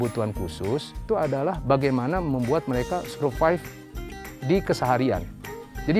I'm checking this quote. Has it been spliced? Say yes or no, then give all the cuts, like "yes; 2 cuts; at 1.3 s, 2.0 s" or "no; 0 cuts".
yes; 1 cut; at 1.0 s